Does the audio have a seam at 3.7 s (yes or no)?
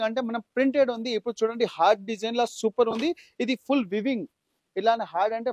no